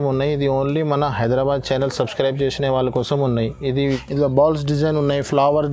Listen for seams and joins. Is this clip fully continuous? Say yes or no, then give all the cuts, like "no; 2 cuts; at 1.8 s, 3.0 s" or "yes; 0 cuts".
no; 1 cut; at 3.8 s